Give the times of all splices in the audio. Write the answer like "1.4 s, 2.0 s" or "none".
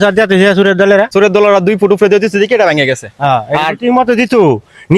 1.1 s